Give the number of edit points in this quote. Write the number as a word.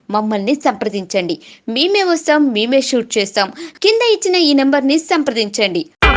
zero